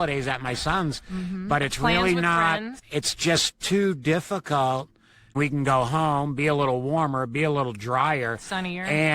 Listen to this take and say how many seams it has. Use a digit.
2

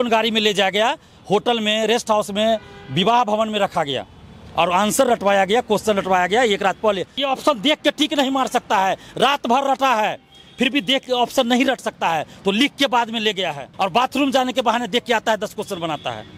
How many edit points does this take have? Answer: 2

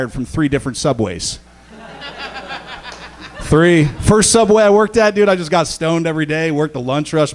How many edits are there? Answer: 1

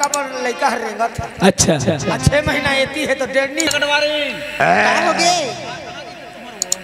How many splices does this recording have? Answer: 1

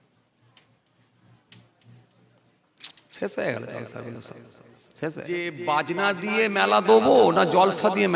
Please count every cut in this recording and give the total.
1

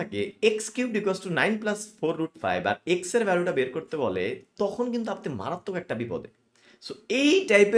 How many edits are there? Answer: 0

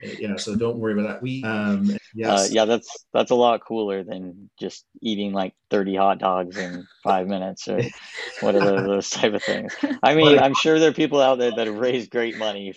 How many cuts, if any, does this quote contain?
1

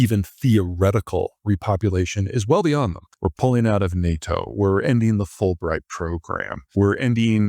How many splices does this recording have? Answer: 2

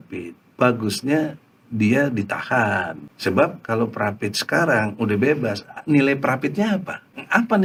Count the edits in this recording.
0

